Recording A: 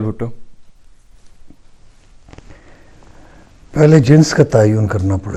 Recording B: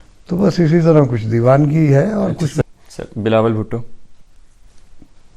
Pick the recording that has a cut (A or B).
B